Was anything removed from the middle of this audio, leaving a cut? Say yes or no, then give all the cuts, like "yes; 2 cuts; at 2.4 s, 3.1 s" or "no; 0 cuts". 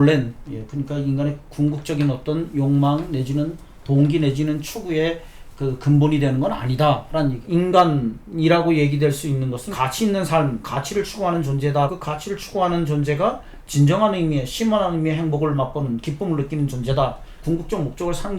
yes; 4 cuts; at 7.4 s, 9.7 s, 11.9 s, 17.4 s